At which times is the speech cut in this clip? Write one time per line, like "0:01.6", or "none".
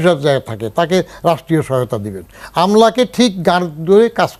none